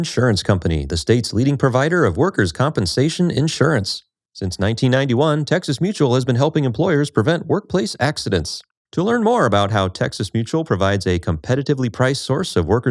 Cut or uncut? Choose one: uncut